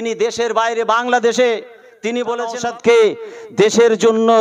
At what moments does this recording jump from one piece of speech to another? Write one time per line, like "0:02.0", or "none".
0:02.6